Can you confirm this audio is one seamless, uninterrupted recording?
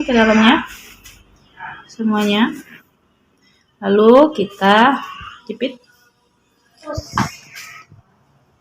no; 1 cut; at 7.0 s

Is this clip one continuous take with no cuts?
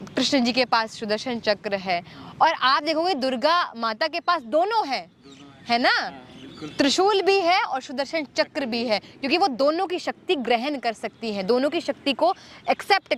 yes; 0 cuts

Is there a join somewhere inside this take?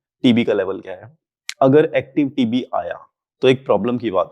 no; 0 cuts

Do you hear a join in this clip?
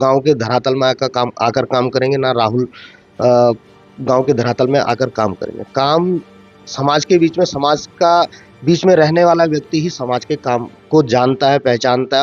no; 0 cuts

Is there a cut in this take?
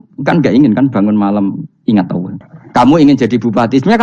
yes; 1 cut; at 2.3 s

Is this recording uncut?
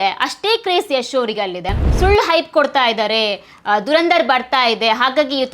no; 1 cut; at 1.9 s

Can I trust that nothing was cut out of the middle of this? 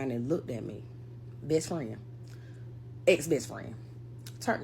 yes; 0 cuts

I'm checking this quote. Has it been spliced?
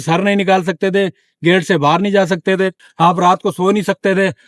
yes; 1 cut; at 2.8 s

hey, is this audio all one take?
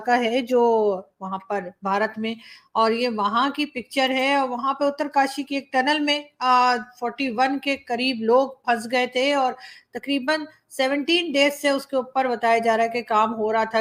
yes; 0 cuts

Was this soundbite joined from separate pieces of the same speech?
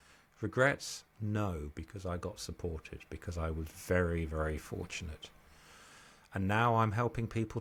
no; 0 cuts

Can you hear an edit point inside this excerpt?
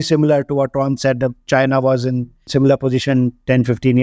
yes; 1 cut; at 2.5 s

